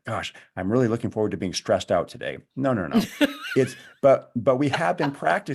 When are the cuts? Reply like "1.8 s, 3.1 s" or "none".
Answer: none